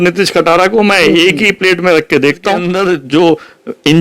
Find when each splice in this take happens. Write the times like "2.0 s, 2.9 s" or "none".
2.7 s